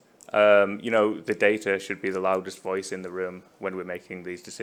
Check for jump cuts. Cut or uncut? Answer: uncut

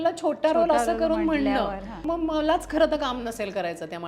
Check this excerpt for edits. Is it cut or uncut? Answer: cut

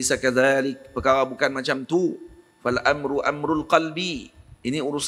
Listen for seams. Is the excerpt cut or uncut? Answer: uncut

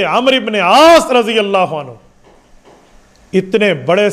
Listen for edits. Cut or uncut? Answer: uncut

